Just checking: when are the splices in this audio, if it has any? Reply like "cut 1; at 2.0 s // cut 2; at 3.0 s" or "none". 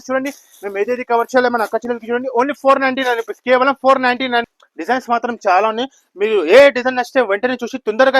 cut 1; at 4.6 s